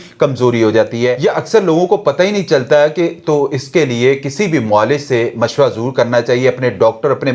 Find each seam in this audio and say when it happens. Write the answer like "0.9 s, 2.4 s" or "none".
none